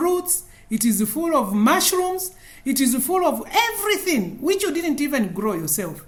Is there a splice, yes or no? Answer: no